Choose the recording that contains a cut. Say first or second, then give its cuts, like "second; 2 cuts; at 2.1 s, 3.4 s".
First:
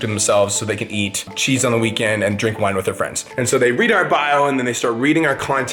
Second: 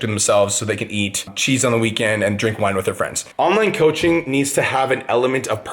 second; 1 cut; at 3.2 s